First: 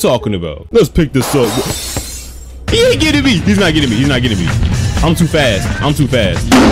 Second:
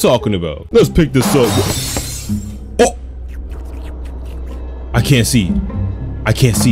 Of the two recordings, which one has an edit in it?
first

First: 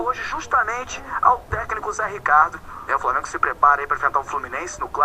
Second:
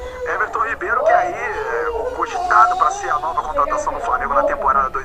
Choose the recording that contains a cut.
first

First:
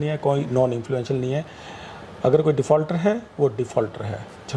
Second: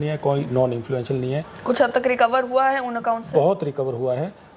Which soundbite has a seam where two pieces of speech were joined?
second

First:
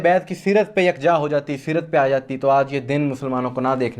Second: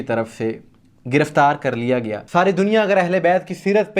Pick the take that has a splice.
second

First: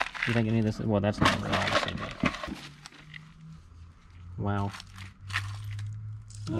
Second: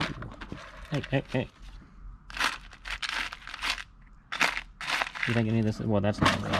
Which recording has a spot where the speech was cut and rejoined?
first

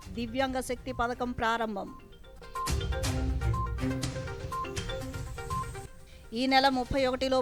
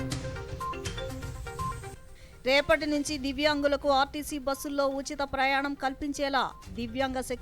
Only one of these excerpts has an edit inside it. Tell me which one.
second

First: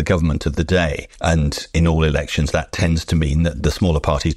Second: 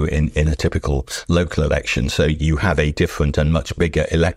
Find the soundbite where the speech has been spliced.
first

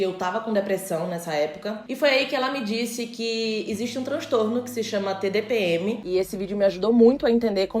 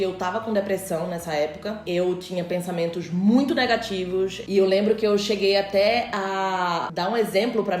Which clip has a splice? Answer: first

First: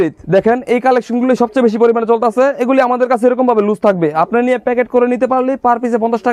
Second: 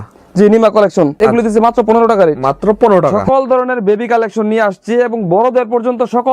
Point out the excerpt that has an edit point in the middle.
second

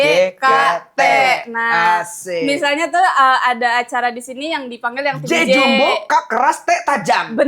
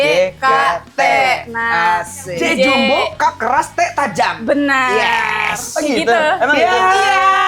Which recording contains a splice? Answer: second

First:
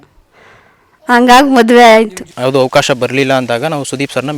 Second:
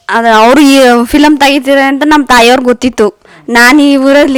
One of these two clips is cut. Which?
first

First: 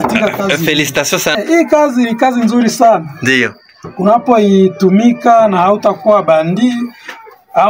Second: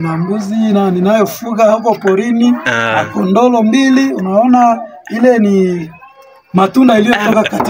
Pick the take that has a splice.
first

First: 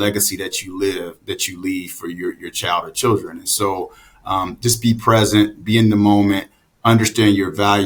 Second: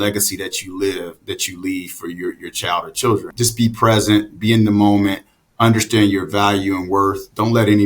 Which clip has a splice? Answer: second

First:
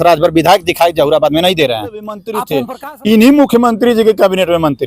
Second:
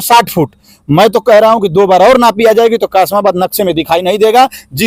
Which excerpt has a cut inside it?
first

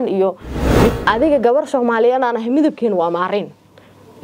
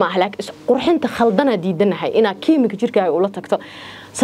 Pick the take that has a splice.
first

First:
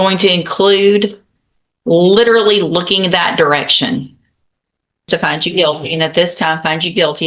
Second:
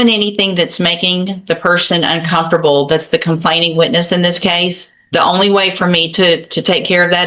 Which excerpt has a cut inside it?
first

